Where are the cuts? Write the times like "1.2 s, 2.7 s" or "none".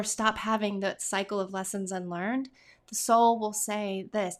none